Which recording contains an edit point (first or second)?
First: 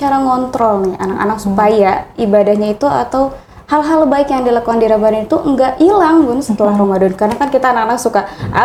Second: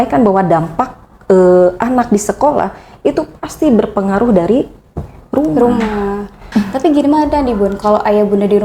second